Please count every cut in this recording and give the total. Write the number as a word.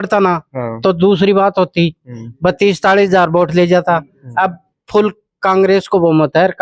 zero